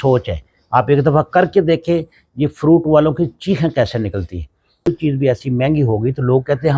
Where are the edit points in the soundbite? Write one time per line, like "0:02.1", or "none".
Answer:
0:04.9

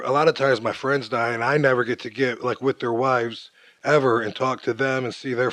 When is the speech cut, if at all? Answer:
none

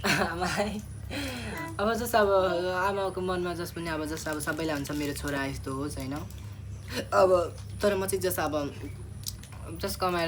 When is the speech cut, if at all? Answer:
none

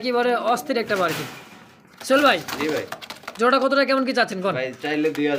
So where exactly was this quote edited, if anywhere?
none

